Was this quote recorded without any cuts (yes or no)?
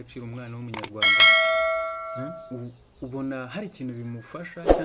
no